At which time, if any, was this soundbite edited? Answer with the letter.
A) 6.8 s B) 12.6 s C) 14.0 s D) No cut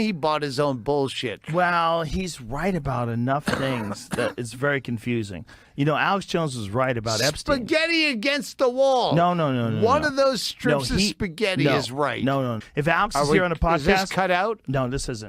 B